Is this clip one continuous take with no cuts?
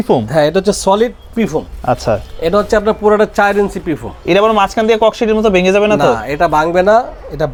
yes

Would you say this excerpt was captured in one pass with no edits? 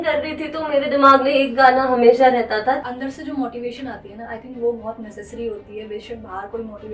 no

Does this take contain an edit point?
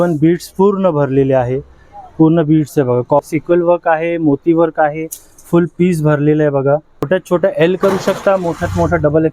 yes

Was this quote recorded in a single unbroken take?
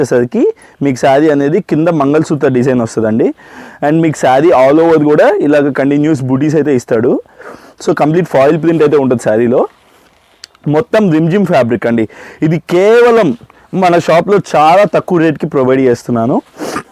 yes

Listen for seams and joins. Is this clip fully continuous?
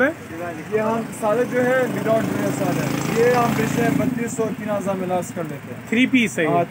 yes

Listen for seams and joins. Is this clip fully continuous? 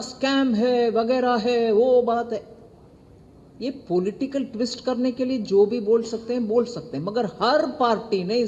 yes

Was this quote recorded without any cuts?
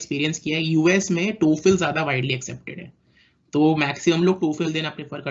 yes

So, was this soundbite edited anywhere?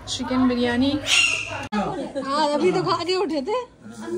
yes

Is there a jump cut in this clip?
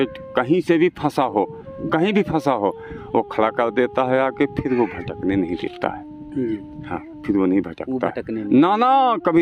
no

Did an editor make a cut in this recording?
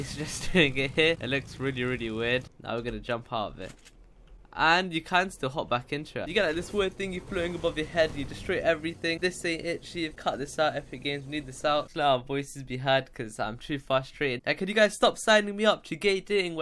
yes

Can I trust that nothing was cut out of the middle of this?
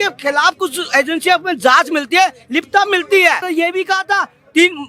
no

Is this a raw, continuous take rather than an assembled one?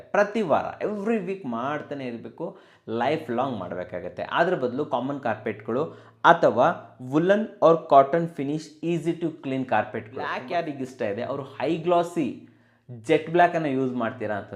no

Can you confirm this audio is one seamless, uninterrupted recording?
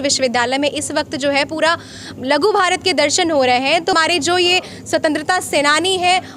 no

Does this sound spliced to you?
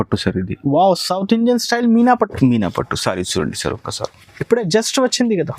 no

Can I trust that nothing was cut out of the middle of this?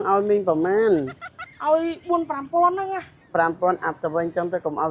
no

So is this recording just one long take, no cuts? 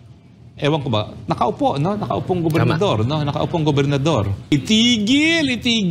no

